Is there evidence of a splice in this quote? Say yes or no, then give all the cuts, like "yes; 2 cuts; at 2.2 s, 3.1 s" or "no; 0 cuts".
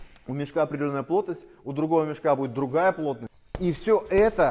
yes; 1 cut; at 3.3 s